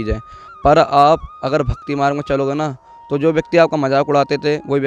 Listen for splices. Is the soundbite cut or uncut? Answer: uncut